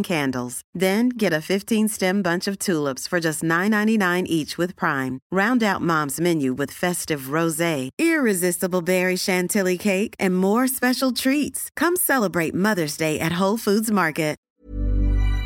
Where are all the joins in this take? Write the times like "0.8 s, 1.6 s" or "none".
14.5 s